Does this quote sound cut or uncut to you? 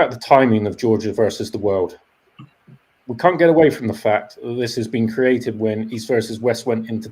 uncut